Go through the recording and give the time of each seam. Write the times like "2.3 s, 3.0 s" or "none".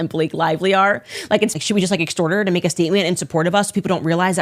1.5 s